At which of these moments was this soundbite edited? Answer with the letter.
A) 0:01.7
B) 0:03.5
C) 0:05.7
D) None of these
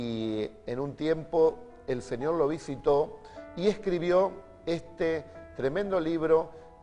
C